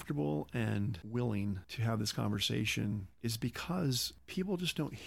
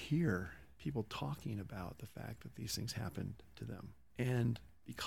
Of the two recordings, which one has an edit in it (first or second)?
first